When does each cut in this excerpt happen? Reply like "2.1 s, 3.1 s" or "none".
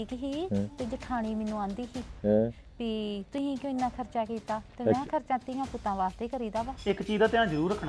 6.8 s